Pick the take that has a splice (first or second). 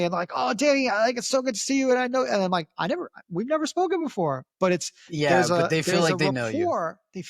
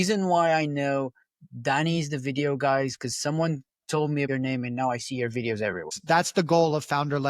second